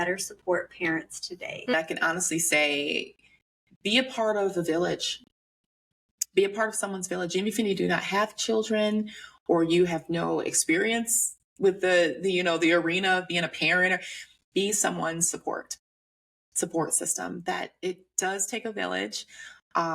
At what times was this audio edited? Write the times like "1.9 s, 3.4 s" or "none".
1.7 s